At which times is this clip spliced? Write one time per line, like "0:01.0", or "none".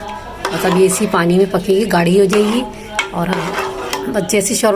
none